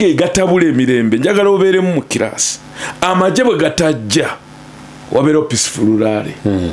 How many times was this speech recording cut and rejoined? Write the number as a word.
zero